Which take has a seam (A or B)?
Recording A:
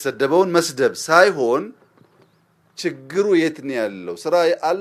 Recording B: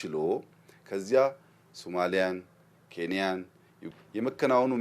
B